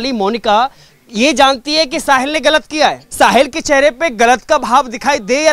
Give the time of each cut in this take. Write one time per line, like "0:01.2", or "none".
0:03.0